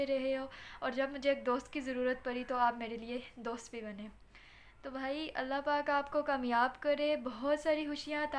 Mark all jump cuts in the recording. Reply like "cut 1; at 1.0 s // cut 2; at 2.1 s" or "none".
none